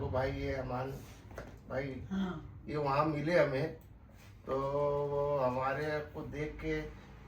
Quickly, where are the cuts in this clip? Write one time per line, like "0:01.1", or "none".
none